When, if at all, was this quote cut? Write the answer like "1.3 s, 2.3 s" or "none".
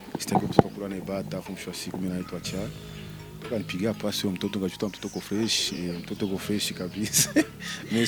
none